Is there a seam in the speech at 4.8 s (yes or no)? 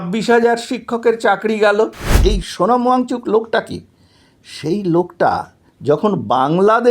no